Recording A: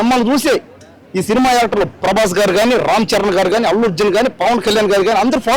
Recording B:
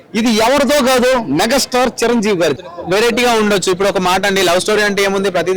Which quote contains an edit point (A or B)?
B